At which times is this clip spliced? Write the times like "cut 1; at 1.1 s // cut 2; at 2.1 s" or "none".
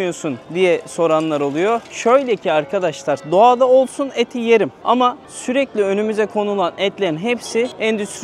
none